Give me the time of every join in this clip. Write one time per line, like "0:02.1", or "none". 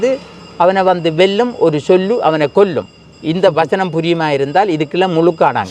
none